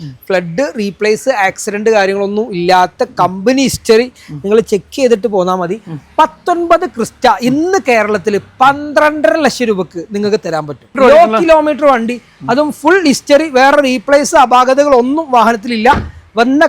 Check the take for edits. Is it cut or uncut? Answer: cut